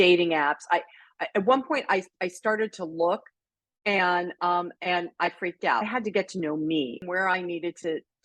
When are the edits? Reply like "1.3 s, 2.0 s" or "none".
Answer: 5.8 s, 7.0 s